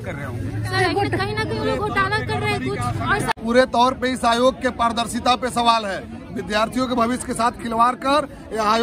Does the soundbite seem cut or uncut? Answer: cut